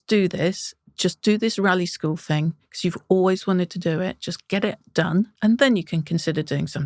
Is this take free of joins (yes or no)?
no